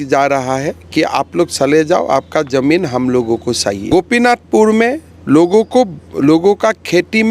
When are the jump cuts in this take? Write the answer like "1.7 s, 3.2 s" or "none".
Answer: 3.8 s